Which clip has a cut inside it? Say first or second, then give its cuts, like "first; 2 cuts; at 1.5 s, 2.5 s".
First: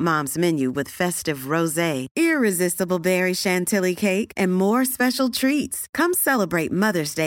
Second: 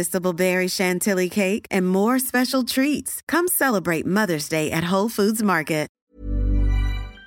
second; 1 cut; at 6.0 s